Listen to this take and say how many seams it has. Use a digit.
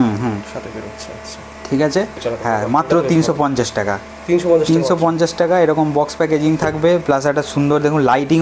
1